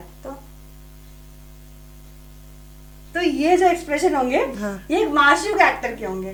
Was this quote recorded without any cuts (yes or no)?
yes